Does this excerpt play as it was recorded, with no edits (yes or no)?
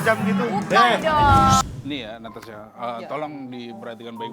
no